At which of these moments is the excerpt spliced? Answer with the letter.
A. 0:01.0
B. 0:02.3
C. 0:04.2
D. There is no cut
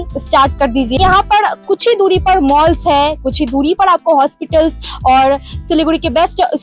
A